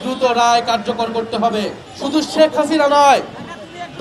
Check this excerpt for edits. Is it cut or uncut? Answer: cut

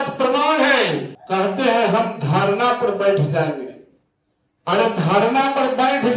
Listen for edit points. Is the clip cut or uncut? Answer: cut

